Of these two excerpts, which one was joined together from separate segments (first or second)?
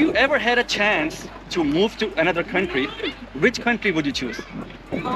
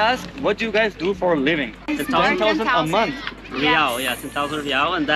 second